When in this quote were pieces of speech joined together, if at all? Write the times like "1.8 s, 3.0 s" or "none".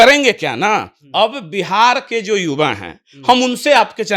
none